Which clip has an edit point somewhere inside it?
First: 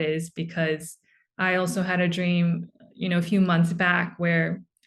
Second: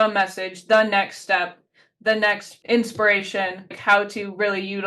second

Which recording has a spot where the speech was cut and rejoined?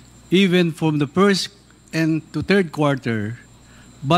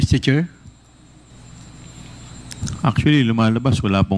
second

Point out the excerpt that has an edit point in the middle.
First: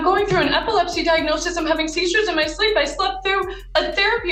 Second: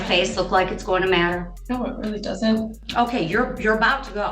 second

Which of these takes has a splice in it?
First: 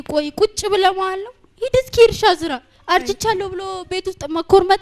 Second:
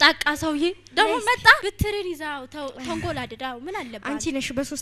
second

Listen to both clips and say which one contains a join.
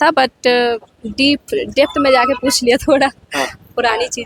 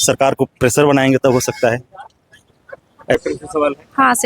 second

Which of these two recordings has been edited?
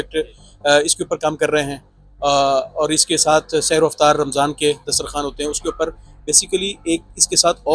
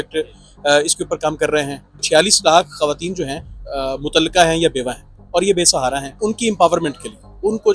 second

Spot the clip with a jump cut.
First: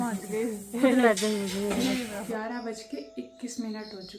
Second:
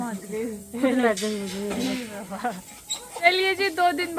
first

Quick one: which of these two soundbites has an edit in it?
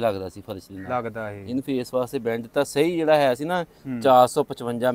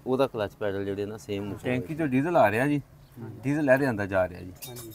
second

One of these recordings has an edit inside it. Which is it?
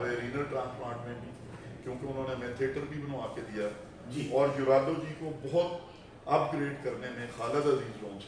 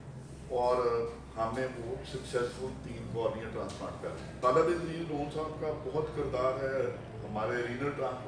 second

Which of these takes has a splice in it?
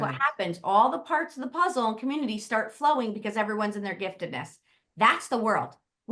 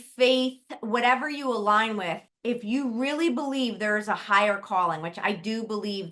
second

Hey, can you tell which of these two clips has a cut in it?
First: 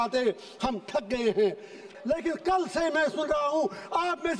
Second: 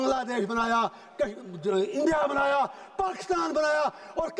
first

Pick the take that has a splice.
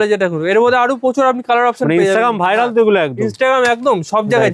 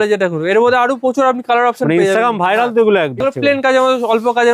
second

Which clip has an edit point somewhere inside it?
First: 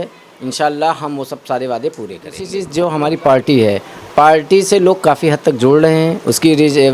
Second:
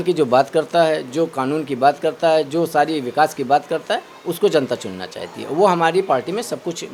first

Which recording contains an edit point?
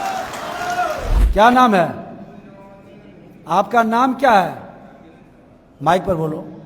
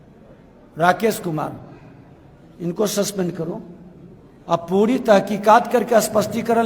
first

